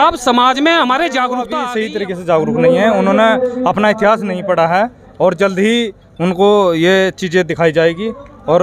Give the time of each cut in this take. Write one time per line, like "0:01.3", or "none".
0:01.5